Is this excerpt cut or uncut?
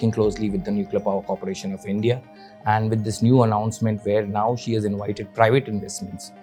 uncut